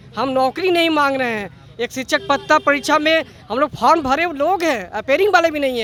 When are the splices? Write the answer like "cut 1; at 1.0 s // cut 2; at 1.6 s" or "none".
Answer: none